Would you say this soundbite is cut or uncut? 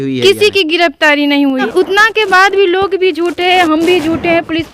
cut